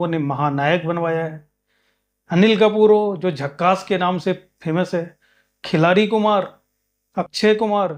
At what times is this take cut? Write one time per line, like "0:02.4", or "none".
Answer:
none